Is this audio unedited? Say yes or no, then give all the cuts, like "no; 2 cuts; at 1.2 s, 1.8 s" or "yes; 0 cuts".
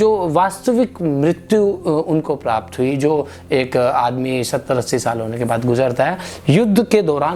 yes; 0 cuts